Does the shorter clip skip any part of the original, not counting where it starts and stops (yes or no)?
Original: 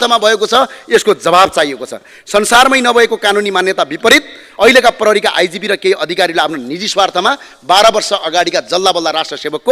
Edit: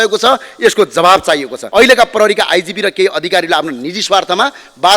yes